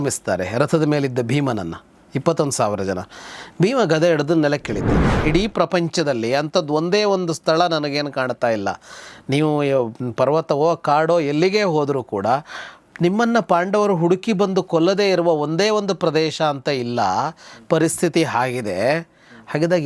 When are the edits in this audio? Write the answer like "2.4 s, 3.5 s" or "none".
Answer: 5.1 s